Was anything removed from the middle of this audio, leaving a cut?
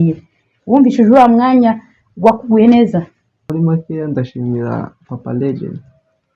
yes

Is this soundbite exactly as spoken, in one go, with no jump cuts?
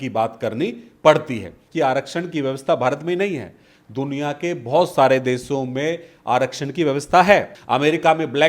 no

